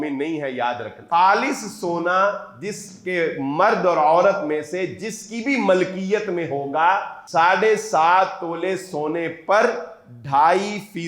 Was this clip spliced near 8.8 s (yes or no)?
no